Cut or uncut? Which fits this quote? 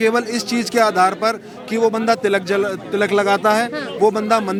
uncut